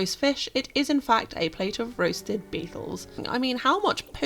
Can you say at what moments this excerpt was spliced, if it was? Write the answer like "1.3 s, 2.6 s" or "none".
3.2 s